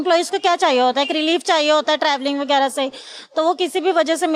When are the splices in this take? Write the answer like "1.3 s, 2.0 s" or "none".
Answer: none

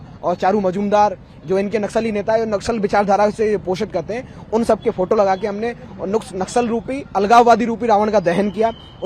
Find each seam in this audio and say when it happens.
none

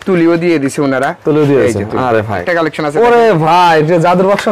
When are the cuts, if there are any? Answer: 2.4 s

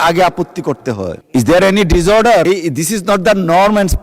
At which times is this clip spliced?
1.2 s, 2.4 s

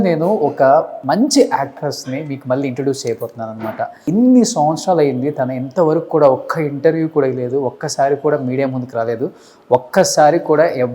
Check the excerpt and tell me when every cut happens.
1.0 s, 4.0 s

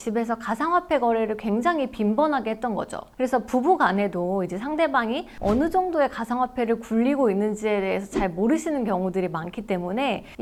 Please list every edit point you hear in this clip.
none

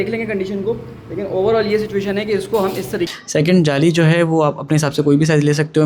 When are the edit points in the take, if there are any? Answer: 3.1 s

